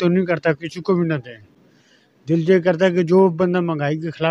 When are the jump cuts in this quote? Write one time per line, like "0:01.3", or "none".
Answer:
none